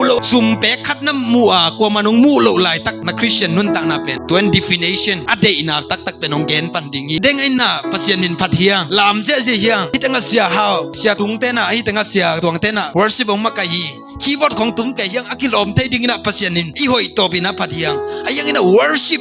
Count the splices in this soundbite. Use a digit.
2